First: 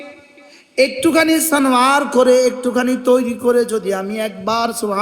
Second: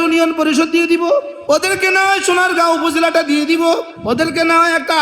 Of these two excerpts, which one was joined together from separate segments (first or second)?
second